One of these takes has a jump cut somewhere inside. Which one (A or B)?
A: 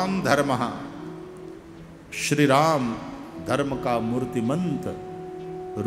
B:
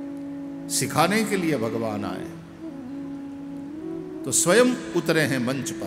B